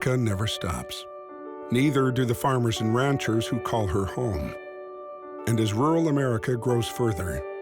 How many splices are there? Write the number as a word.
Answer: zero